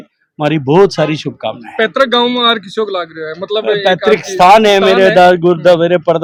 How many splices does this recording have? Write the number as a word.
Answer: zero